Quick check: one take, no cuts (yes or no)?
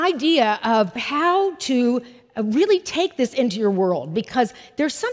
no